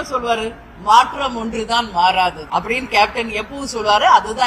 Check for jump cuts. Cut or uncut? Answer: uncut